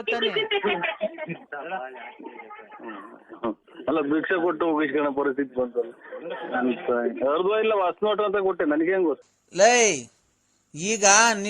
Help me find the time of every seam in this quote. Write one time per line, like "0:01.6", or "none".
0:09.2